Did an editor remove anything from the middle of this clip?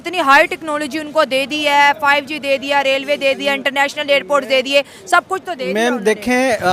no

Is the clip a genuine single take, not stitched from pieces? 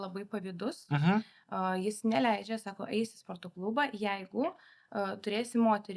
yes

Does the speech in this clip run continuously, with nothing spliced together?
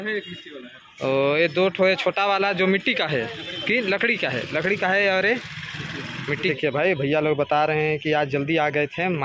no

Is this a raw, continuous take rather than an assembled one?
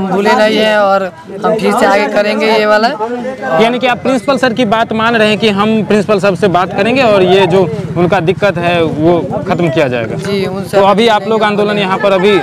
yes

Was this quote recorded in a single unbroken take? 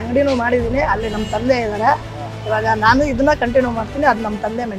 yes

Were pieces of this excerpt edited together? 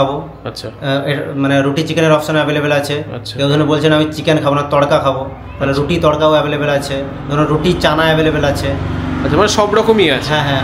no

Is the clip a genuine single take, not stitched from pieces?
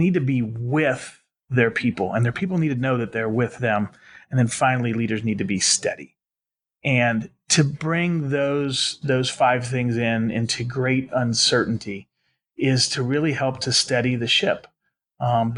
yes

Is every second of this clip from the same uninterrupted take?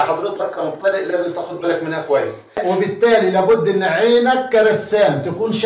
no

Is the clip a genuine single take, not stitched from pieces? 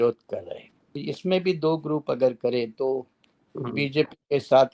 no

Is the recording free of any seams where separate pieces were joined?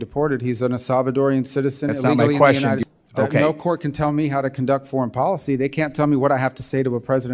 no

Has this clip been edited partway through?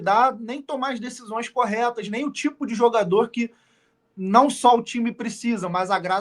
no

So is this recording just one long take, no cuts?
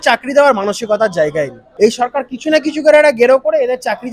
no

